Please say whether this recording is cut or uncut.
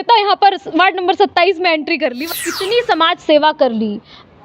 cut